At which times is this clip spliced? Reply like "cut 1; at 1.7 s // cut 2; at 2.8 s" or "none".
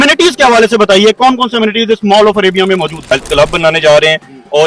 cut 1; at 3.0 s